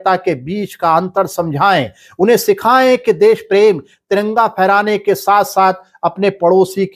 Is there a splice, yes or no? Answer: no